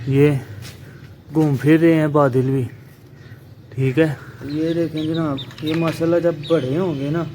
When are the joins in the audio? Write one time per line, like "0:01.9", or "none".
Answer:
0:04.3

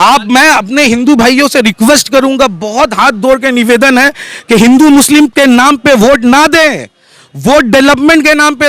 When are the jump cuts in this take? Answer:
none

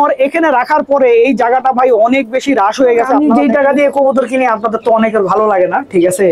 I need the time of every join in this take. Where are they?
0:03.1

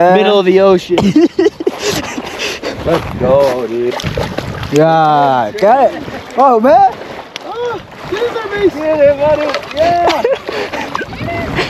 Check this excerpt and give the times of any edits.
0:03.9

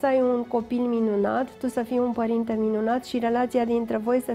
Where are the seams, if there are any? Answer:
none

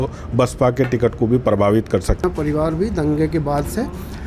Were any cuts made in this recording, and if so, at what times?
0:02.2

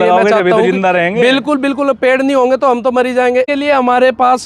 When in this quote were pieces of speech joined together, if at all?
0:03.5

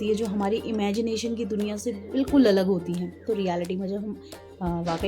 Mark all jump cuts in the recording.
0:03.2

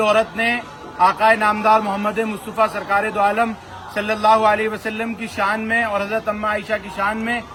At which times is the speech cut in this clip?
none

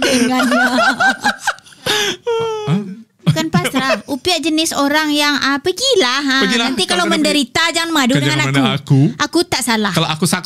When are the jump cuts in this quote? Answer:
0:02.6

